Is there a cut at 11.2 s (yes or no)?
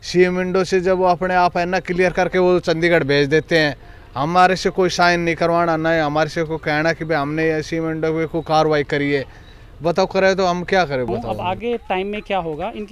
yes